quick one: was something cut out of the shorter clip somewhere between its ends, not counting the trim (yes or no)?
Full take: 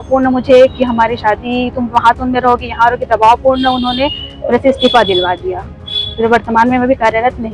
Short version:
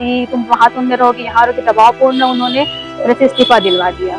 no